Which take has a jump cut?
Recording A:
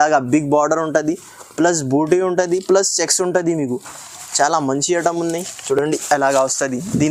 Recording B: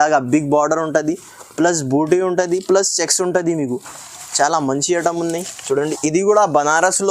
B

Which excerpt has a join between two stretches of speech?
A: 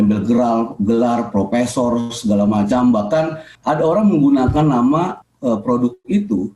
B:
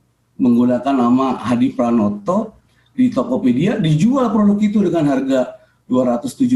A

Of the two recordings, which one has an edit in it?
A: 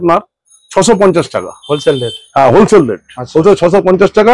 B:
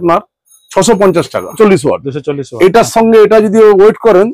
B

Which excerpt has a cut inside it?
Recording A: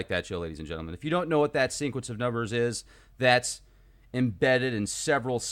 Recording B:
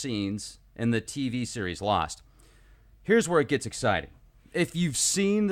A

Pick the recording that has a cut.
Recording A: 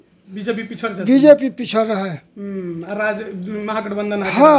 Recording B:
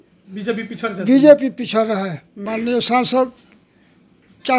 B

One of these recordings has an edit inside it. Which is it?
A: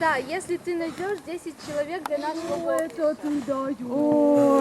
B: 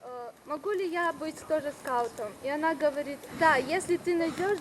A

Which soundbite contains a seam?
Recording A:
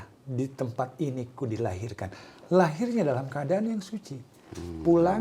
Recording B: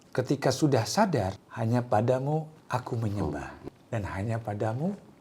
B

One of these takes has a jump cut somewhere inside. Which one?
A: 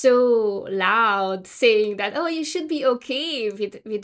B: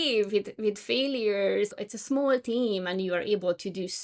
B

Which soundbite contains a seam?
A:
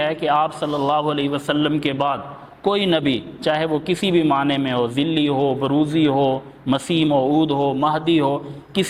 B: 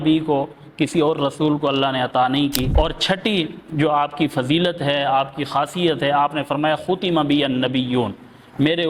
B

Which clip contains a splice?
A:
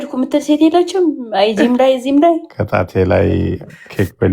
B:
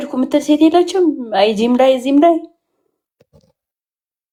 A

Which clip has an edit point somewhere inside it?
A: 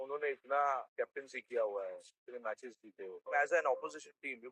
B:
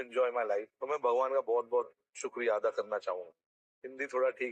A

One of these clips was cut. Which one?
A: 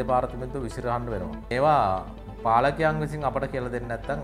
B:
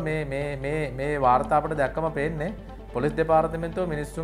A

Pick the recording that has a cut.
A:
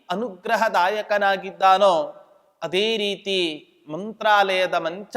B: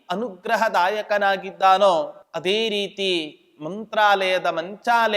B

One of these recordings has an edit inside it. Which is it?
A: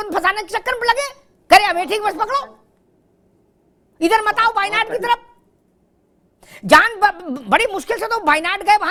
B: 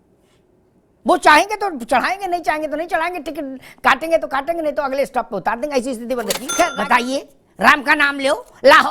B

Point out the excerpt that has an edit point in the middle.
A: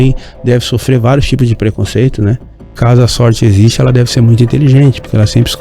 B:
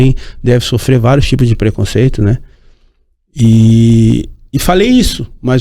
A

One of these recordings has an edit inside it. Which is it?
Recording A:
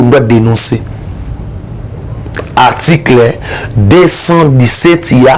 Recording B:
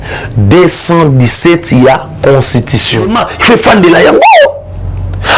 B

